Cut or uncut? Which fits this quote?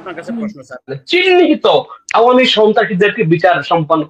cut